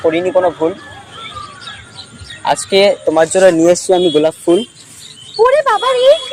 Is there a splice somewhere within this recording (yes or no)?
no